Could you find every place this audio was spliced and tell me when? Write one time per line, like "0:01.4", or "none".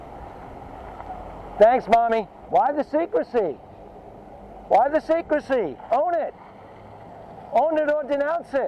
0:02.3